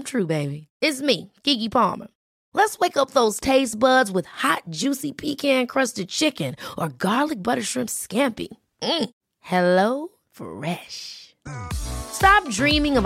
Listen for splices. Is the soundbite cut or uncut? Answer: uncut